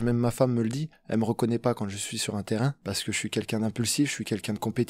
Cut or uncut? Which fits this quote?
cut